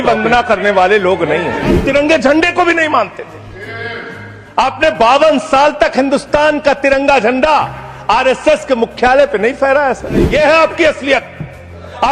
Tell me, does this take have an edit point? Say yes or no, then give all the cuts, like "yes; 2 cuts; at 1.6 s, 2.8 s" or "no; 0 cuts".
yes; 2 cuts; at 1.8 s, 10.3 s